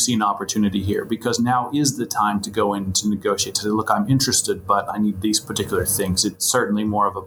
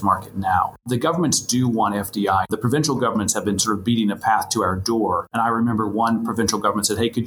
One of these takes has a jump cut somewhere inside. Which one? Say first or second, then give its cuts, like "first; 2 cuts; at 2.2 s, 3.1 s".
second; 3 cuts; at 0.8 s, 2.5 s, 5.3 s